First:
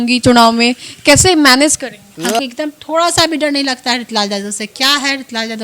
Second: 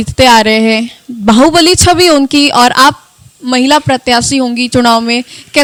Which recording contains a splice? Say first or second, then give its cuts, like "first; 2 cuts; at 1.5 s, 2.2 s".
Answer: first; 1 cut; at 2.1 s